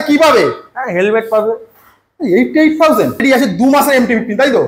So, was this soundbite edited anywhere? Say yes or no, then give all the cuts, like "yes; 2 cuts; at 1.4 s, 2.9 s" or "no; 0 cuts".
yes; 1 cut; at 3.2 s